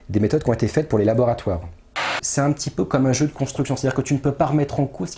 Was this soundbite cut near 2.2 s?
yes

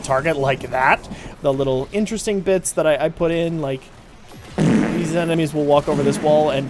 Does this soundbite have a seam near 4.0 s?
no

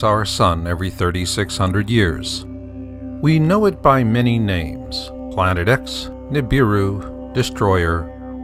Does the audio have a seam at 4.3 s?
no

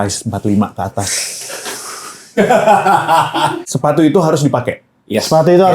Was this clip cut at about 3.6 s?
yes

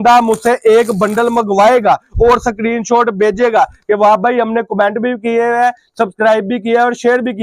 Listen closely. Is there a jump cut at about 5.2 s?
no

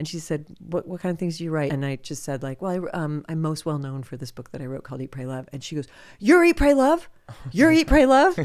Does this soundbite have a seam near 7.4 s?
no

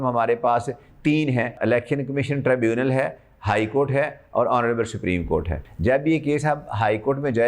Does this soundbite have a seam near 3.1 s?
no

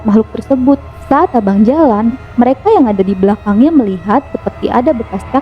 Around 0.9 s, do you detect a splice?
yes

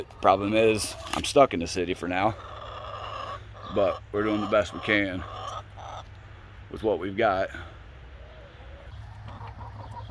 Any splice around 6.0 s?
no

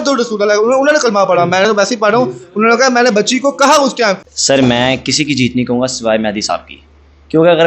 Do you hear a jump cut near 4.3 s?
yes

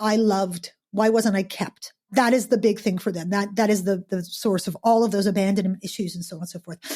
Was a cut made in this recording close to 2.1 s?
yes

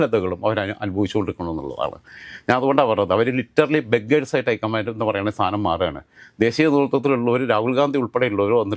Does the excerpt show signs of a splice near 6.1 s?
no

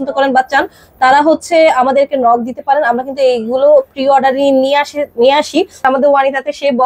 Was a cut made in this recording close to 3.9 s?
no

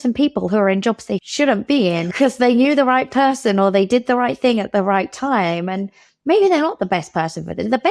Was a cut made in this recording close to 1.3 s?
yes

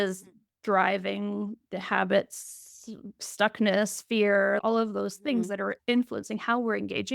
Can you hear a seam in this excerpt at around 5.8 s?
yes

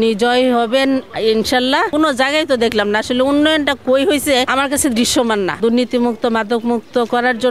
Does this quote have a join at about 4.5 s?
yes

